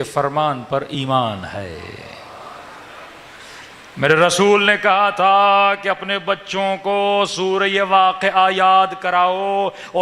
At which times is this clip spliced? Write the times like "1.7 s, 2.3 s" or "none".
none